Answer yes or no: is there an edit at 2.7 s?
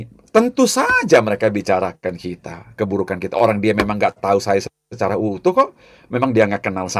no